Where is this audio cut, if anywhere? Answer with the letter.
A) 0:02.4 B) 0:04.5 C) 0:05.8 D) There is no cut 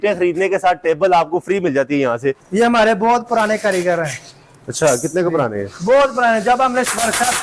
A